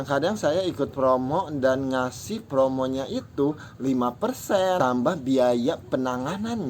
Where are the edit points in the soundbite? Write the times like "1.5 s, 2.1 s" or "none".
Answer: 4.8 s